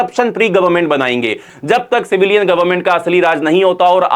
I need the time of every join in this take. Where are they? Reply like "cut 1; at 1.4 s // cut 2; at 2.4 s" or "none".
cut 1; at 1.4 s